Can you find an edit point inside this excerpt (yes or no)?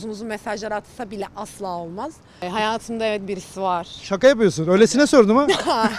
yes